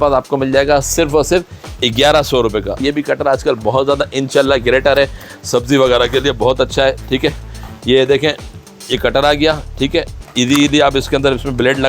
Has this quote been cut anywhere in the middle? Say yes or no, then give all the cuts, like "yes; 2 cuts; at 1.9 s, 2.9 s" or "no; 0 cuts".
no; 0 cuts